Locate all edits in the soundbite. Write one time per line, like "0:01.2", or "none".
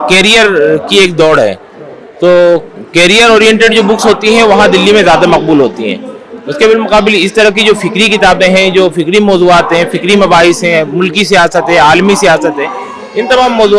none